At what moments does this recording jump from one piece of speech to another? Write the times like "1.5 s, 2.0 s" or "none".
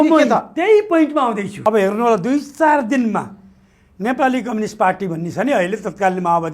1.5 s